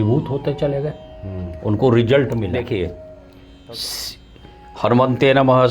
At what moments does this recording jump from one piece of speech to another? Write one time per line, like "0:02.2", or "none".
0:02.5